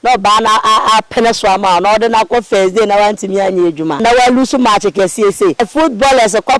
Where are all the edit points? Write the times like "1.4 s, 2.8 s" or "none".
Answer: 4.0 s, 5.7 s